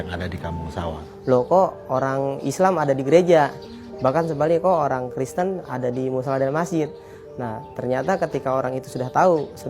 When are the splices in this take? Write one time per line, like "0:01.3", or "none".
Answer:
0:01.0